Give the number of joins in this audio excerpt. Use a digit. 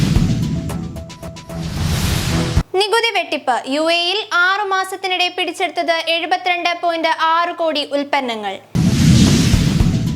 2